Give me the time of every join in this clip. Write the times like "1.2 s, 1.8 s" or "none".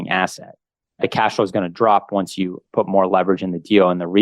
1.0 s